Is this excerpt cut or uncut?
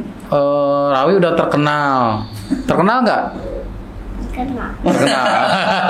uncut